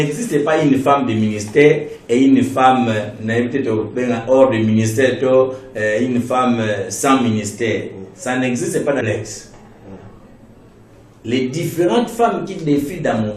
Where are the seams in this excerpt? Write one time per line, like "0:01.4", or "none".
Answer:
0:09.0